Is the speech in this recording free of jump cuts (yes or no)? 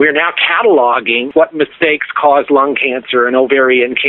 no